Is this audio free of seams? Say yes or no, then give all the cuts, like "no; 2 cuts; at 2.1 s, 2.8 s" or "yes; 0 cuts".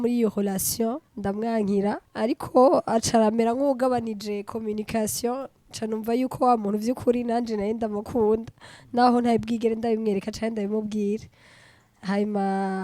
no; 2 cuts; at 1.1 s, 2.1 s